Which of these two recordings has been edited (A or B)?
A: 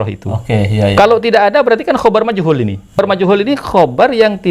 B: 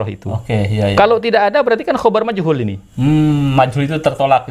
A